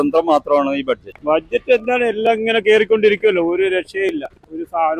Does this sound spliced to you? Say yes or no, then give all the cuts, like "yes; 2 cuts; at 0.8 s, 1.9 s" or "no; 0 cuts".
yes; 1 cut; at 1.1 s